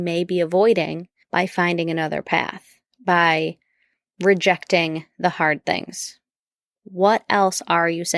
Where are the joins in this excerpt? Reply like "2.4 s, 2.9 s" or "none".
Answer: none